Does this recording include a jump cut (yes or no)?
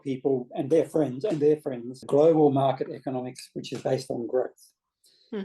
yes